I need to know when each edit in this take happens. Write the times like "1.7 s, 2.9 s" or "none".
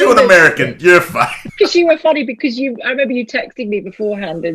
1.4 s